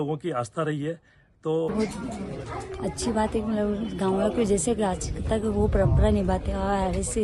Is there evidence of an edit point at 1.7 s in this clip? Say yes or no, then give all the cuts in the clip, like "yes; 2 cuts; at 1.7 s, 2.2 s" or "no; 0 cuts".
yes; 1 cut; at 1.7 s